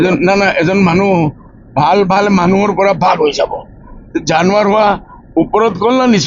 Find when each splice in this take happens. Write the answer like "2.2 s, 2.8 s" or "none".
none